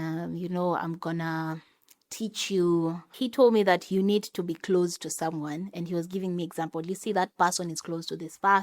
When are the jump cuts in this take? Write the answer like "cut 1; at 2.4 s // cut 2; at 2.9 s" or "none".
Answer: cut 1; at 3.1 s

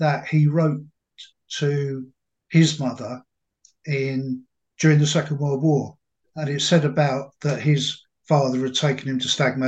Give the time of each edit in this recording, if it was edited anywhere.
cut 1; at 6.2 s

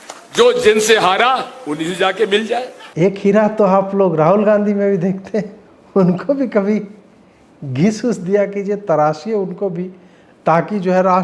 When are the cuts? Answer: cut 1; at 2.8 s

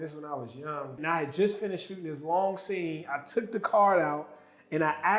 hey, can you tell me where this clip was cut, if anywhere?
cut 1; at 0.9 s

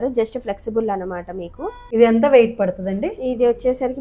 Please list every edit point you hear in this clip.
cut 1; at 1.8 s

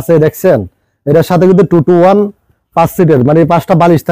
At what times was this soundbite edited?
none

